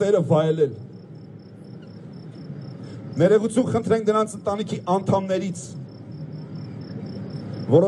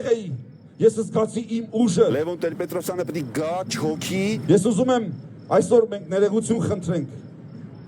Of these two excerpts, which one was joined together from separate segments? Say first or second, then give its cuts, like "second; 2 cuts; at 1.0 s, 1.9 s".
second; 2 cuts; at 2.1 s, 4.4 s